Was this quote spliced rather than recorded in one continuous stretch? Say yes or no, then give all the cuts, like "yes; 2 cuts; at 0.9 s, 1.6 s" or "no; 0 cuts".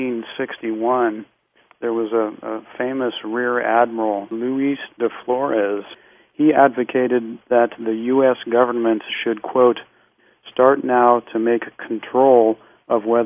no; 0 cuts